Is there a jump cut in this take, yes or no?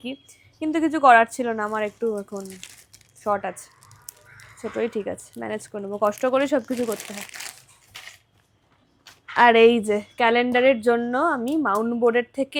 no